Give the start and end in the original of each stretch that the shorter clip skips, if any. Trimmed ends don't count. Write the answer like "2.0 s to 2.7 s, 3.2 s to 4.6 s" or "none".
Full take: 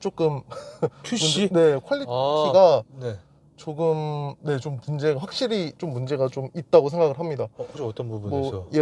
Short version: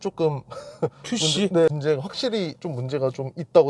1.7 s to 4.9 s